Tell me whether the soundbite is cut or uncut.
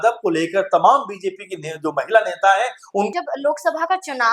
cut